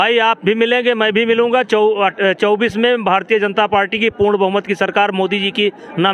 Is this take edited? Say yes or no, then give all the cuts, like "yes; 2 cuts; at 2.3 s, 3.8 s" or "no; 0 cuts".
no; 0 cuts